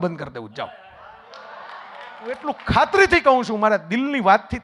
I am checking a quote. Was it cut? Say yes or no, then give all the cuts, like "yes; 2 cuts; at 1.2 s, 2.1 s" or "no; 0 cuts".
yes; 1 cut; at 2.4 s